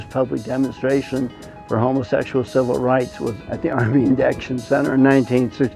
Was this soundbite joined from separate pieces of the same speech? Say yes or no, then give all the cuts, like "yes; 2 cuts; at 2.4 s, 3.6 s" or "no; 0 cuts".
yes; 1 cut; at 3.4 s